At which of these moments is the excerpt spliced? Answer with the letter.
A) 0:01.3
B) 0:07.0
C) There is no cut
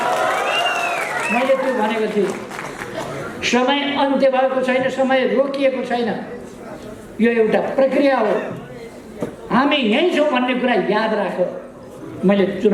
C